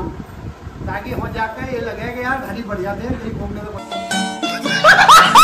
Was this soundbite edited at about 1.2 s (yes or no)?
no